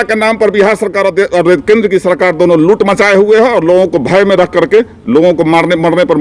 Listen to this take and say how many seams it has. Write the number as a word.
zero